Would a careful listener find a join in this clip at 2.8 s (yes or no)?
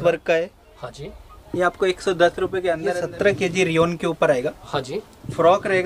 yes